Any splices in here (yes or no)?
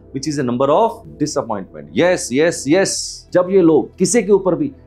yes